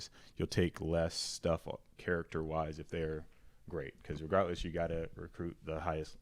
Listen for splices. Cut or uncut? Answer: uncut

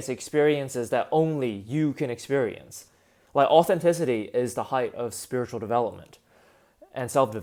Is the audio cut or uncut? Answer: uncut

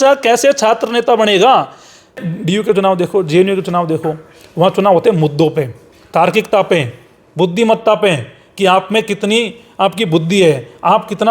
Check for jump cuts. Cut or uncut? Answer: cut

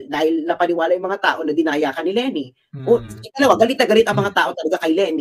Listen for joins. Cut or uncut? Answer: uncut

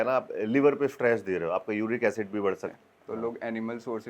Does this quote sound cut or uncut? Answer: cut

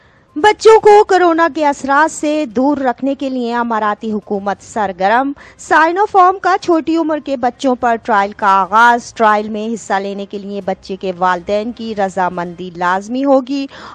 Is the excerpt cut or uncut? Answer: uncut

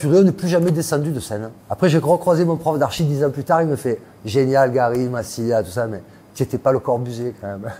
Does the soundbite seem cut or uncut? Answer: uncut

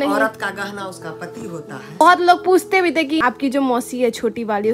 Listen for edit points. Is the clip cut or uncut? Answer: cut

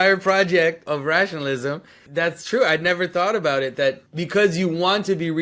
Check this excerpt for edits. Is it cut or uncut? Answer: cut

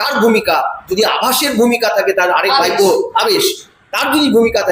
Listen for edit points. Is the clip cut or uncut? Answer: uncut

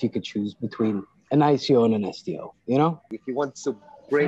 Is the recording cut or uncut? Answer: cut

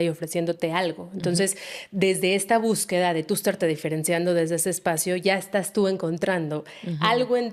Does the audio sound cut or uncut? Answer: uncut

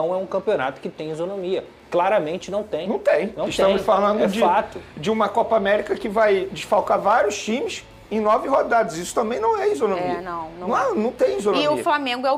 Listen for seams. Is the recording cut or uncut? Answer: uncut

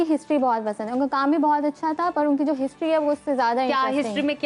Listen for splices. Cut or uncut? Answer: uncut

